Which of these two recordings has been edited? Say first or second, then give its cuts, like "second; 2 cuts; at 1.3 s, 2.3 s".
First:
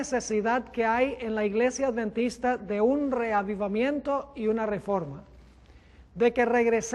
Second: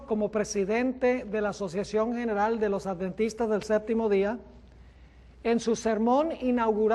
first; 1 cut; at 2.1 s